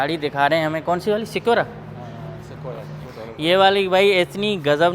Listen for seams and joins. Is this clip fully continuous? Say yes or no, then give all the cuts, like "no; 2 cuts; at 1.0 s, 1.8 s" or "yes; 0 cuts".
no; 1 cut; at 3.0 s